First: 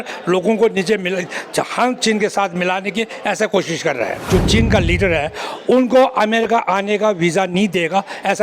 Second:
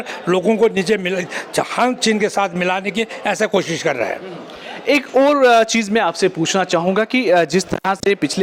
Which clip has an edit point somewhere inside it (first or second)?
first